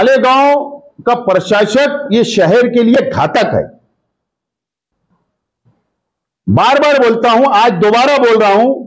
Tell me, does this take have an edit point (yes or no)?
no